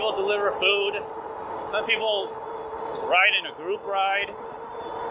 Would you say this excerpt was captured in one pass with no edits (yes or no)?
yes